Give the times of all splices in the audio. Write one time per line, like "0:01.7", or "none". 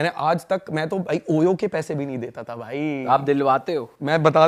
none